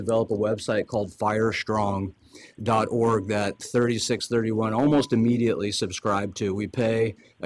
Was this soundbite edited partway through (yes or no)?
no